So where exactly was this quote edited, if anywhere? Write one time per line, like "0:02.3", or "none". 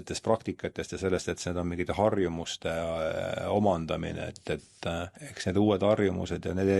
0:05.2